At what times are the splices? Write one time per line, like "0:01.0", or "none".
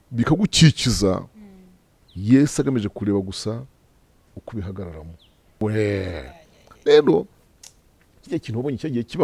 0:05.6